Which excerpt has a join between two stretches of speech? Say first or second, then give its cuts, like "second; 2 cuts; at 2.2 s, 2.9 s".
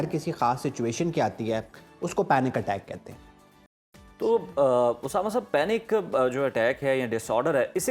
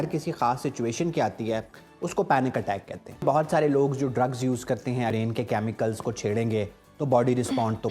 second; 2 cuts; at 3.2 s, 5.1 s